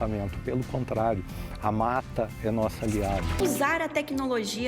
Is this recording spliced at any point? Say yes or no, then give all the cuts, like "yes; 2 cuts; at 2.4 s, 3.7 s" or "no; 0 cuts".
yes; 1 cut; at 3.4 s